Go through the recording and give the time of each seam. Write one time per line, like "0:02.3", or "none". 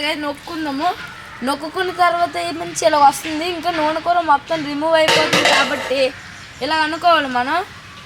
none